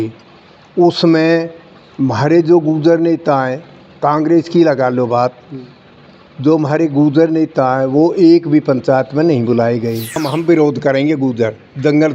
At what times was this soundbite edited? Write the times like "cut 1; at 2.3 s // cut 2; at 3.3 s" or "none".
cut 1; at 10.2 s